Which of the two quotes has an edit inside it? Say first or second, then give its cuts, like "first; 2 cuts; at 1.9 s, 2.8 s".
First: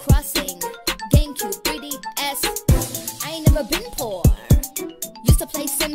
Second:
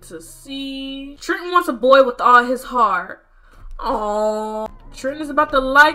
second; 2 cuts; at 1.2 s, 4.7 s